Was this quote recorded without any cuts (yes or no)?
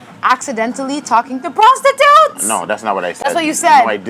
yes